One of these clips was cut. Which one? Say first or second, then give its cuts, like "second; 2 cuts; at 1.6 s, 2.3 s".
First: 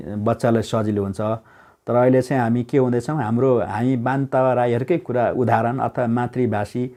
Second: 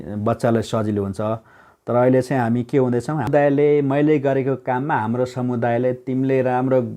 second; 1 cut; at 3.3 s